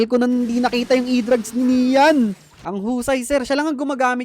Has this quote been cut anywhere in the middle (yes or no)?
yes